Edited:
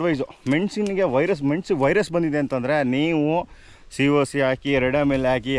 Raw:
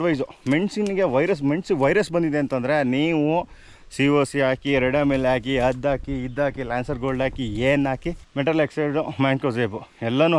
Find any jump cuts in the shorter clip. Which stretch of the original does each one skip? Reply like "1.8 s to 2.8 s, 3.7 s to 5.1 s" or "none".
none